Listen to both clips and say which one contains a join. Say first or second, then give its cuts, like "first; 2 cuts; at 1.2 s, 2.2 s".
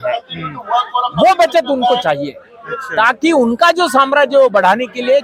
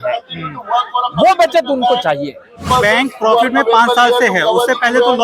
second; 1 cut; at 2.7 s